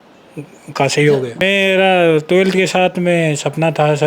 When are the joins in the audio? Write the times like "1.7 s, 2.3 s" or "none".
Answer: 1.4 s